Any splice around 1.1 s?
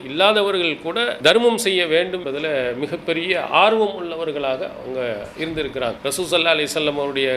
yes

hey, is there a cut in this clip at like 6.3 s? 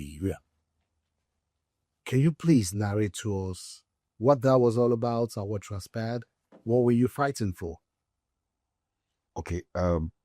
no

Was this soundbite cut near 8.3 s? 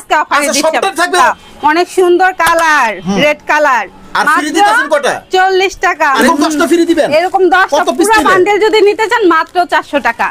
no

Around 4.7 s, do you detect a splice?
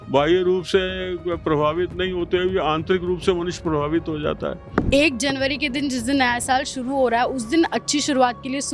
yes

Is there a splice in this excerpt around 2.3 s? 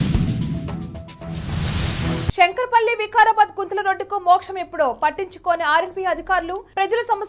yes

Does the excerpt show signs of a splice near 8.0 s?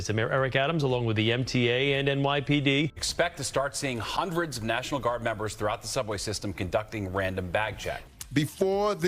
yes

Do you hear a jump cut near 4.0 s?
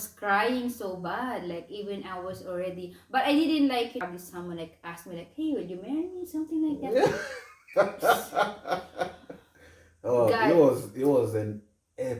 yes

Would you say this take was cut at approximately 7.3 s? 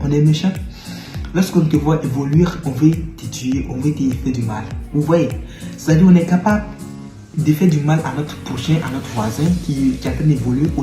yes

